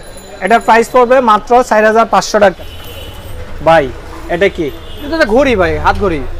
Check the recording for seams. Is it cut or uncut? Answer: cut